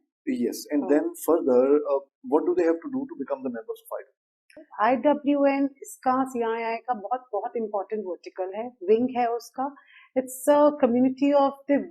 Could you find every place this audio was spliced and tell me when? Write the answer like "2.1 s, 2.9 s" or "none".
4.6 s